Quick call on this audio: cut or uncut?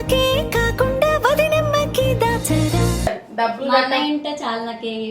cut